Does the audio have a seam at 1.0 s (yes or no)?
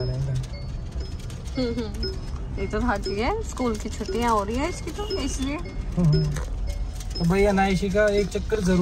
no